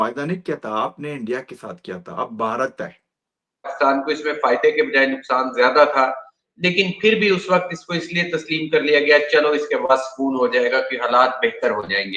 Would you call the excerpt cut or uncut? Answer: cut